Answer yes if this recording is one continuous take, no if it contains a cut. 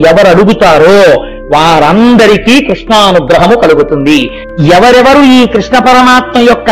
no